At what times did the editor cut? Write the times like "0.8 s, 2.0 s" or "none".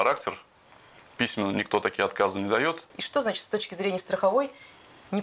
2.9 s